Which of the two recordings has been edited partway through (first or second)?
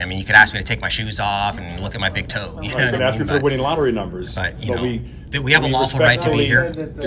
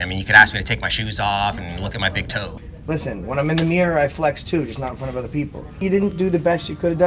second